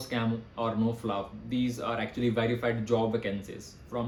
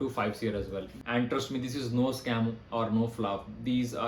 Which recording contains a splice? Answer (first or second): second